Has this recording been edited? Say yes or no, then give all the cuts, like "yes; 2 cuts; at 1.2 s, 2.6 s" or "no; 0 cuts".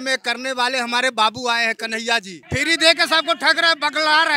yes; 1 cut; at 2.4 s